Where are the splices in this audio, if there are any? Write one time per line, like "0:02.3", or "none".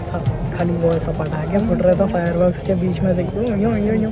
none

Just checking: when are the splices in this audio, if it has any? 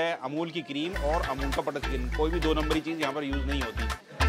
none

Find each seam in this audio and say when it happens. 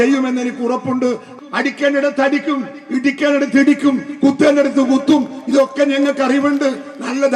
0:01.3

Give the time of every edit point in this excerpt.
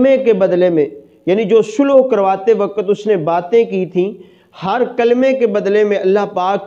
none

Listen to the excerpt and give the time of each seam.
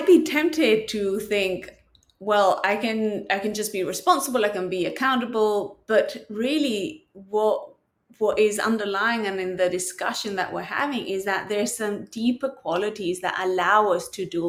none

